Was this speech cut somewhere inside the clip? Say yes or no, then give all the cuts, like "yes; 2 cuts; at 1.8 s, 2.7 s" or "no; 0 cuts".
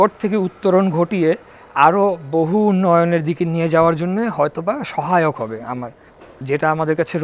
yes; 1 cut; at 6.3 s